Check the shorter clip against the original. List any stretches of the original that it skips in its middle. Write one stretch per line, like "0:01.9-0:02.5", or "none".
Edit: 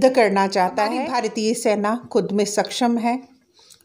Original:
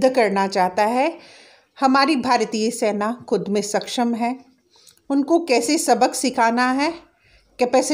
0:01.0-0:02.2

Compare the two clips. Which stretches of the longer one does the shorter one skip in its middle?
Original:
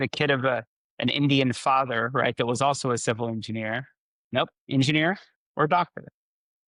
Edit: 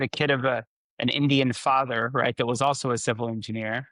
none

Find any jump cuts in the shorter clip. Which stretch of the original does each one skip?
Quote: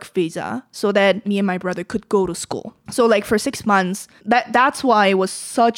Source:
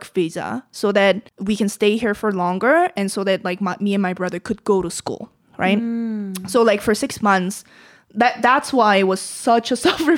0:01.2-0:03.8
0:05.3-0:06.3
0:07.6-0:08.0

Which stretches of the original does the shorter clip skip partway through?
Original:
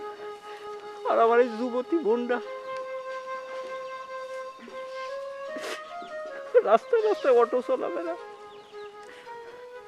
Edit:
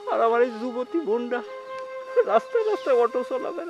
0:03.0-0:06.4

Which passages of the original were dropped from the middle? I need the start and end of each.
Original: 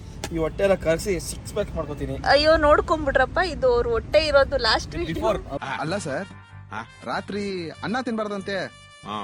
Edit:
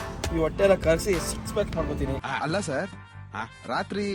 0:02.2-0:05.6

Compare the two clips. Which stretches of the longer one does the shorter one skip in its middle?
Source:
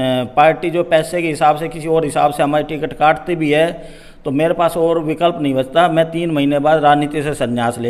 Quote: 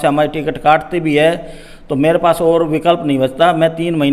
none

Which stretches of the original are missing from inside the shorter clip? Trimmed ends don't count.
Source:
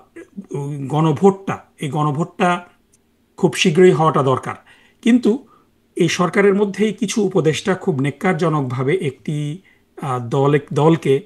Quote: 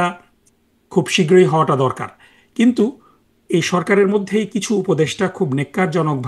none

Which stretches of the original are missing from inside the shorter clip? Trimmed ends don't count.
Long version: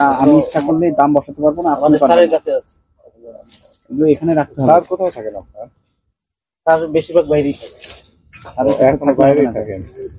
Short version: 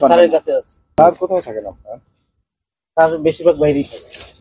0:03.0-0:04.7

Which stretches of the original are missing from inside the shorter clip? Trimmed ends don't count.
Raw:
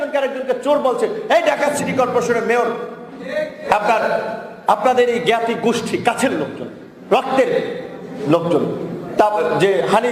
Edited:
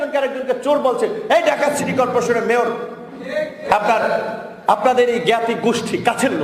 none

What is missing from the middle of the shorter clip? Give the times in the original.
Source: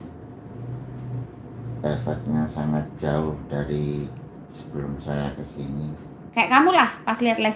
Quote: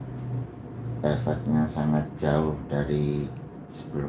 none

